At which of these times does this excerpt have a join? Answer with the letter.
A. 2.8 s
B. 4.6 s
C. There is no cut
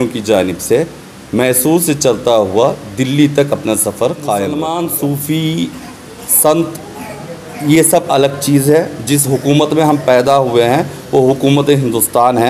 B